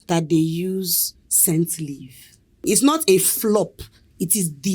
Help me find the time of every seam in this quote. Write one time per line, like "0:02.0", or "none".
0:02.7

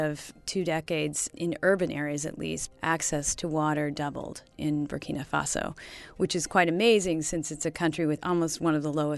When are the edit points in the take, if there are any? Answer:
0:01.3
0:04.6
0:08.2

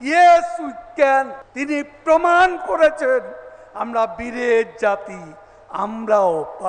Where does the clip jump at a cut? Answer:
0:01.4

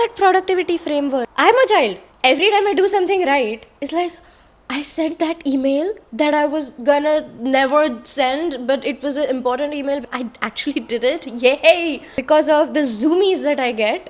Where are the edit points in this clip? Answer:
0:01.3
0:10.1
0:12.1

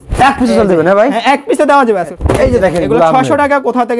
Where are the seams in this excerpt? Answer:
0:02.1

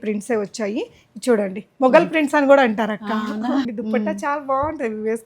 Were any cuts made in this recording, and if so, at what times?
0:03.6

